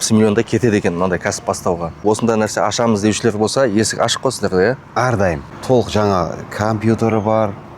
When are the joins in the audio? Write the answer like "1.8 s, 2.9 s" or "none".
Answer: 2.0 s, 5.5 s